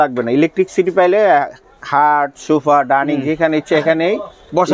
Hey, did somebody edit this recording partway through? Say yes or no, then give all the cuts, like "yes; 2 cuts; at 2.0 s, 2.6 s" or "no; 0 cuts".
no; 0 cuts